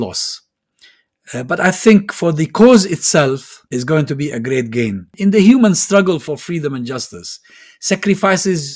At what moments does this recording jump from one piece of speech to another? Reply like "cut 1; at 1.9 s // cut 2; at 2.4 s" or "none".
cut 1; at 3.5 s // cut 2; at 5.1 s